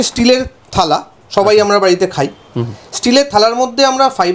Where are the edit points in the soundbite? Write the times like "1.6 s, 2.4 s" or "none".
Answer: none